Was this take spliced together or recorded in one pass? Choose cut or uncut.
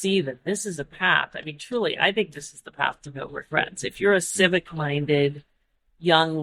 uncut